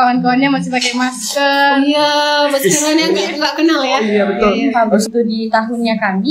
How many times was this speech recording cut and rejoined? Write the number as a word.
one